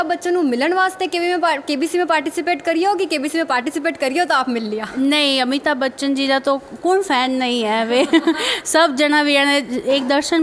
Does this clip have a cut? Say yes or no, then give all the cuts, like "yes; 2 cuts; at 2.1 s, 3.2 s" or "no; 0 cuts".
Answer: no; 0 cuts